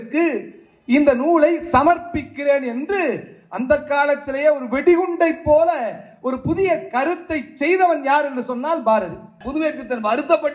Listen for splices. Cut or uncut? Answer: cut